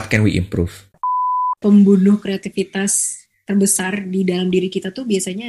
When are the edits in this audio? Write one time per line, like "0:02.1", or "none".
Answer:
0:01.2